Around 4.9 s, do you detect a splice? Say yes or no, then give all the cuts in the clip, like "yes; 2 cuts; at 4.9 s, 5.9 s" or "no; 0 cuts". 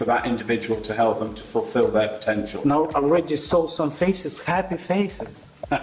no; 1 cut; at 2.5 s